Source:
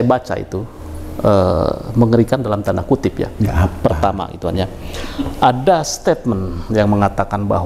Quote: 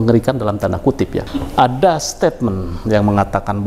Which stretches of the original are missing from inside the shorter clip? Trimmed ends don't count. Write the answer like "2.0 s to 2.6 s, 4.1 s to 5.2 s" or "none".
3.3 s to 5.1 s